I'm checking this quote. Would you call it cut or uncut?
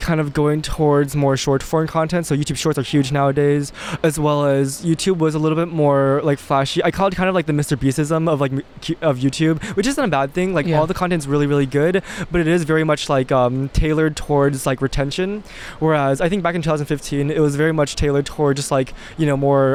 uncut